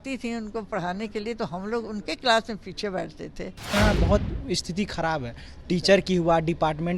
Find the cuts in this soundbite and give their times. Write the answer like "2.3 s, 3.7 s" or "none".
3.7 s